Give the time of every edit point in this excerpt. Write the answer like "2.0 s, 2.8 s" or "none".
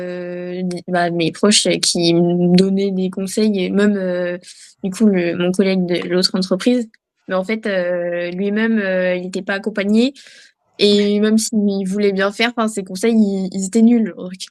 none